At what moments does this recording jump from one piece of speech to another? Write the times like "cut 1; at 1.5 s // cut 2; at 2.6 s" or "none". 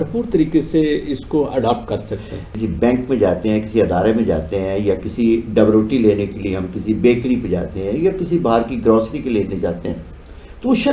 cut 1; at 2.6 s